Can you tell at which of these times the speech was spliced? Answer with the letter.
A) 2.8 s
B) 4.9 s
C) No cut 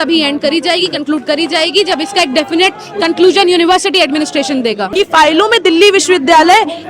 B